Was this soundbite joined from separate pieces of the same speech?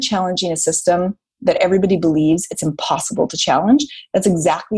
no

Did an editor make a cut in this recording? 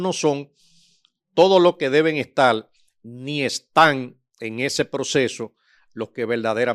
no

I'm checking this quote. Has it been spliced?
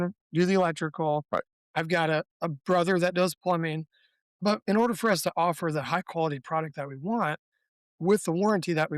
yes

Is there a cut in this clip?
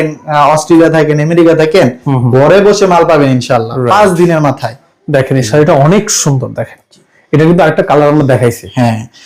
no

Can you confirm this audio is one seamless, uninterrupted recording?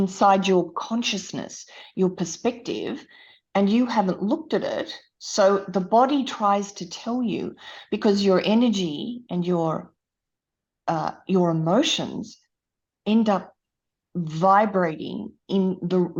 yes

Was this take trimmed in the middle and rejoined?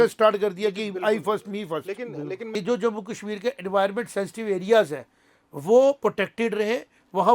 yes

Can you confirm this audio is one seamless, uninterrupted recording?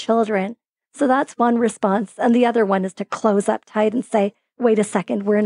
yes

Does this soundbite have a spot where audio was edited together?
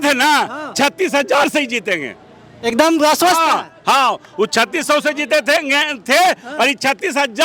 no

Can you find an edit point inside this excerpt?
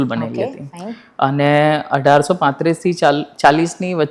no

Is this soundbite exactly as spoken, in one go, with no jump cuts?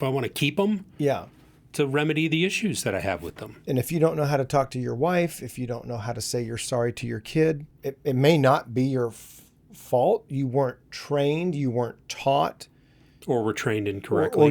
no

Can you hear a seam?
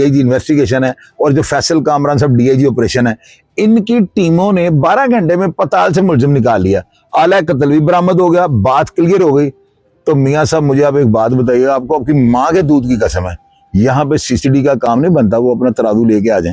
no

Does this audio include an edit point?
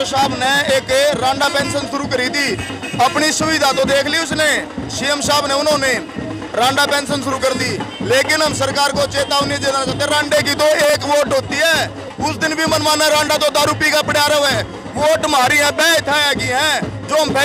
no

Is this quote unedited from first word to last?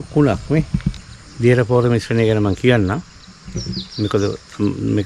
no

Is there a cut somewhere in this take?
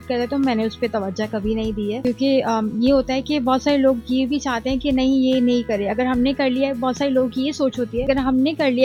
no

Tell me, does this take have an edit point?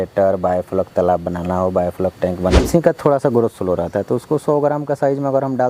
yes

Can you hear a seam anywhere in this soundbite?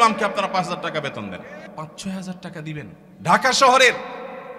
yes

